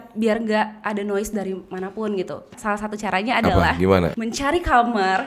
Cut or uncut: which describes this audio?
cut